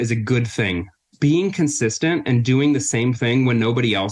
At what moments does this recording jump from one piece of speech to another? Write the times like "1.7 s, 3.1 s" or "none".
1.1 s